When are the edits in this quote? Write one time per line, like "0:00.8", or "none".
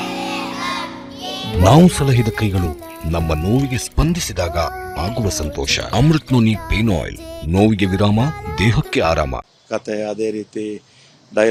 none